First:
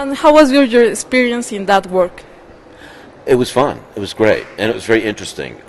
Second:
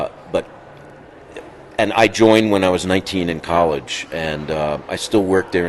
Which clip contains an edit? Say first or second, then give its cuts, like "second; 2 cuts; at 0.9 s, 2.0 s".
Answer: first; 1 cut; at 3.5 s